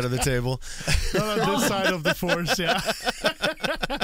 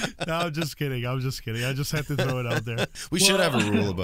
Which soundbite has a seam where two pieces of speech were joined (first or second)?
second